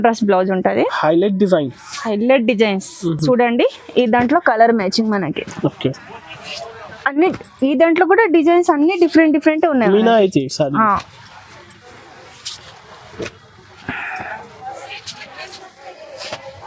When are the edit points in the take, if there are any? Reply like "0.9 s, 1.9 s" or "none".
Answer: none